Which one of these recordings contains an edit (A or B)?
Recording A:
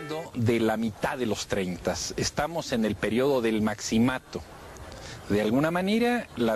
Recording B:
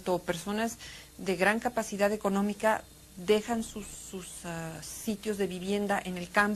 B